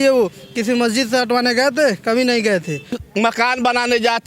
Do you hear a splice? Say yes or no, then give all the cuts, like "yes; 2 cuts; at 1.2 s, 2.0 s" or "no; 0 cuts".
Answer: yes; 1 cut; at 3.0 s